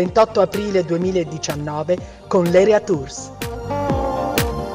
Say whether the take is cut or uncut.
cut